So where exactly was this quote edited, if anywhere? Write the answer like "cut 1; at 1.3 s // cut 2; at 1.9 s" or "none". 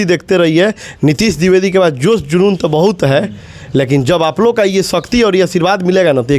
none